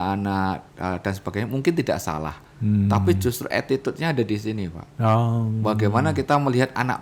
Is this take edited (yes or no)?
no